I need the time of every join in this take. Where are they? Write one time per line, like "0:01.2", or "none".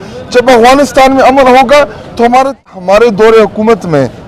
0:02.7